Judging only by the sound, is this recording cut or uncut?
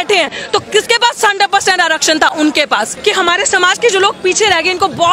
cut